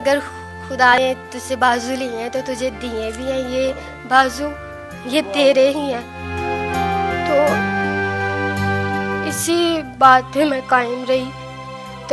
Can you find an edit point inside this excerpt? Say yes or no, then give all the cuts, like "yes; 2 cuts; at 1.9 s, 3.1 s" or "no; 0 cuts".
yes; 1 cut; at 0.9 s